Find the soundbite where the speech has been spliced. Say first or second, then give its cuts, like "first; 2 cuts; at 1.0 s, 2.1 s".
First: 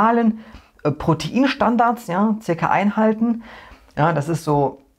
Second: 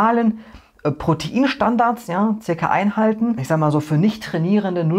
second; 1 cut; at 3.4 s